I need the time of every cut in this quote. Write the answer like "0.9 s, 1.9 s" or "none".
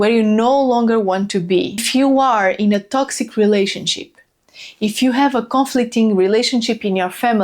1.9 s